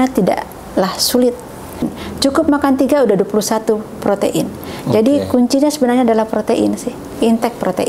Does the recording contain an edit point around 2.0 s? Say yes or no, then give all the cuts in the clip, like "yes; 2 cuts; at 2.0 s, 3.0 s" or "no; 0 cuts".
yes; 1 cut; at 2.0 s